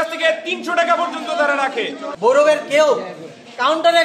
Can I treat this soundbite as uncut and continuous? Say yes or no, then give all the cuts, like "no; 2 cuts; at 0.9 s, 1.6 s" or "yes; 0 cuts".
no; 1 cut; at 2.0 s